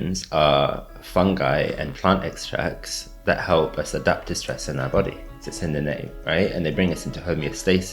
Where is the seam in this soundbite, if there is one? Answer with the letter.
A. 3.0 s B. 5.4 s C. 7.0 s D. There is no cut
D